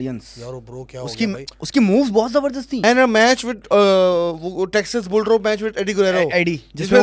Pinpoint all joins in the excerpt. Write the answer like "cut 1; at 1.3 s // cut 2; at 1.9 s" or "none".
cut 1; at 1.5 s // cut 2; at 2.8 s